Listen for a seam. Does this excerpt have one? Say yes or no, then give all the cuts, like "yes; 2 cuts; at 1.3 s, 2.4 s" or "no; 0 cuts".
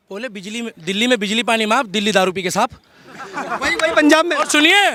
no; 0 cuts